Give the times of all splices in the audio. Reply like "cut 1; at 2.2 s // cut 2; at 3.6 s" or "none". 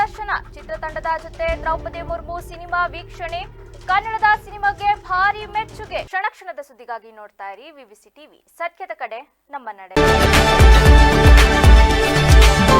none